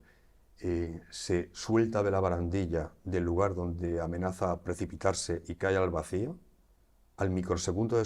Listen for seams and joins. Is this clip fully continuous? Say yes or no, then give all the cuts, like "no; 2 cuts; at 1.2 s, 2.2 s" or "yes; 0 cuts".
yes; 0 cuts